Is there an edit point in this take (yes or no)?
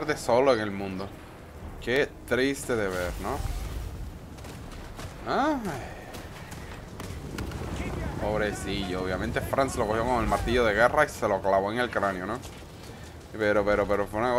no